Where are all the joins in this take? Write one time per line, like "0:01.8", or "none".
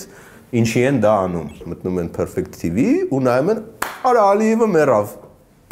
0:01.6